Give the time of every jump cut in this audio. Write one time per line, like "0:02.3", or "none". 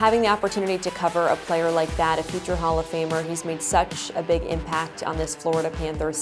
none